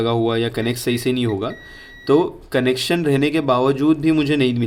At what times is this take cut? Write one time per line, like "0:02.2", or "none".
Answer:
none